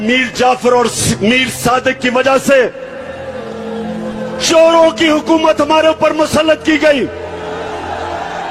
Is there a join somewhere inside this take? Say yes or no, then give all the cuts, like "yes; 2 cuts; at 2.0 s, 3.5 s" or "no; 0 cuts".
no; 0 cuts